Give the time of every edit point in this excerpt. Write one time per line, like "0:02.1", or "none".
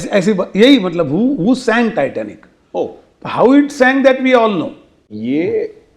0:05.0